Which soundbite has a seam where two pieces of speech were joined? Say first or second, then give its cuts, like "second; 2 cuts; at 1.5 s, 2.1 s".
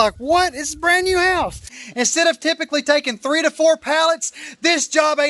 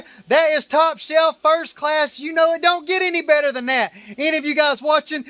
first; 1 cut; at 1.7 s